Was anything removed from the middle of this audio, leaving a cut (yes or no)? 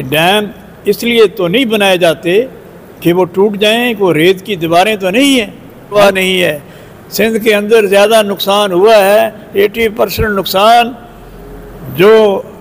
yes